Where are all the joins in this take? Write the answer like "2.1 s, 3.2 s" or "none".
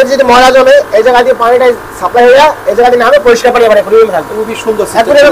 none

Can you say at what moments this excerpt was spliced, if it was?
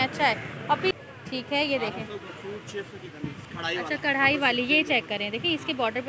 0.9 s

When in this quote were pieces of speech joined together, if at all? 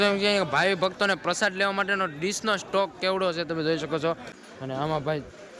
4.3 s

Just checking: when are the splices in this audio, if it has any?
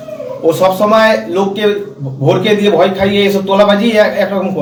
none

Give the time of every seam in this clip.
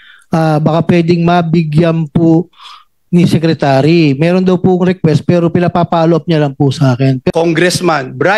7.2 s

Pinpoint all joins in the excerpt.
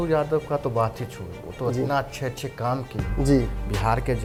none

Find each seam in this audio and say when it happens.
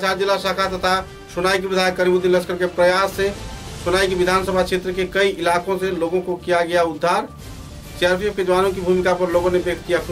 none

